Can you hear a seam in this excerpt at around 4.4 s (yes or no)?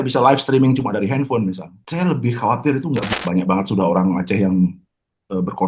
no